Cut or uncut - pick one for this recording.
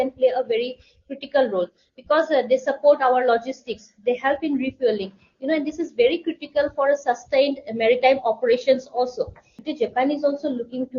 cut